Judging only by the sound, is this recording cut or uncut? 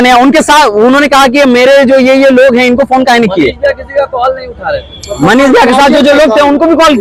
uncut